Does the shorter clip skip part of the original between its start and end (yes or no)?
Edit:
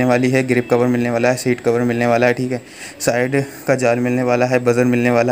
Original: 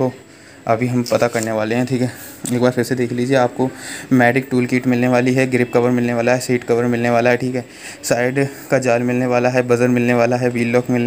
no